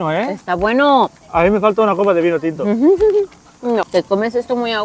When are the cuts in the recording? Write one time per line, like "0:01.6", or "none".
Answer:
0:01.2
0:03.9